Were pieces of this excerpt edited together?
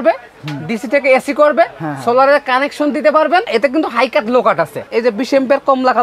yes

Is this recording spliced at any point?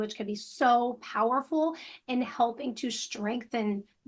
no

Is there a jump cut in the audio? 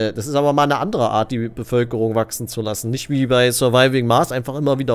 no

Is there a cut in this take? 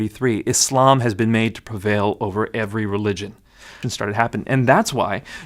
yes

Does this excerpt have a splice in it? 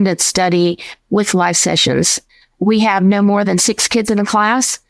yes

